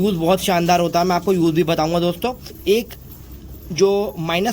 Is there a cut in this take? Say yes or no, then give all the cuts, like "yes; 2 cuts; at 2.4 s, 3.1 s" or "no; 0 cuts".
yes; 1 cut; at 2.5 s